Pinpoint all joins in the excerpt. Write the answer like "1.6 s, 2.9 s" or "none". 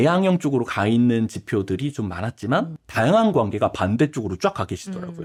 none